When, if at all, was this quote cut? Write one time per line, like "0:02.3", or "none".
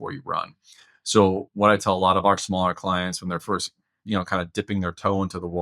none